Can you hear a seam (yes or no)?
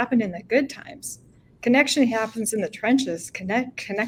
no